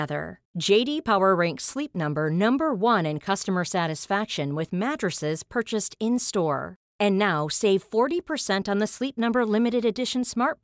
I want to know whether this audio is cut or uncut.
uncut